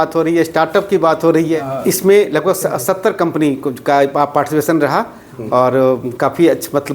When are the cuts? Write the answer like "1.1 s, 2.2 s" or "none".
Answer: 1.6 s